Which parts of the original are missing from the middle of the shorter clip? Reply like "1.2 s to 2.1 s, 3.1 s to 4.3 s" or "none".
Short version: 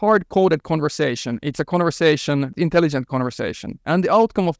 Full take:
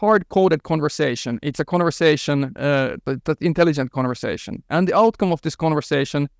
2.5 s to 3.4 s